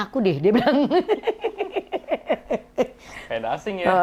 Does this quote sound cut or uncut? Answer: uncut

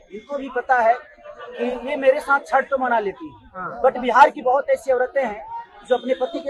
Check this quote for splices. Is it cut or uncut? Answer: uncut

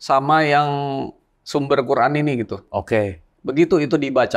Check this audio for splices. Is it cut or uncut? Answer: cut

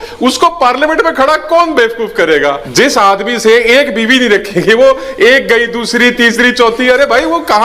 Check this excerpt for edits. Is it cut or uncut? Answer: cut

